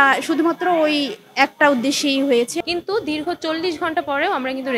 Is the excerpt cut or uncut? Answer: cut